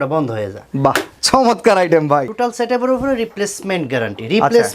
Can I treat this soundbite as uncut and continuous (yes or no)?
no